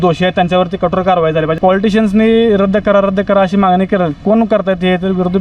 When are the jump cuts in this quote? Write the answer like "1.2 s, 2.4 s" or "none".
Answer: 1.6 s